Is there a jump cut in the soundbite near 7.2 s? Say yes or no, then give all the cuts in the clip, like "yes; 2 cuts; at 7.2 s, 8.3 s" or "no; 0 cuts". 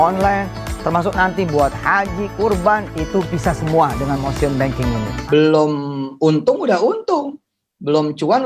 no; 1 cut; at 5.1 s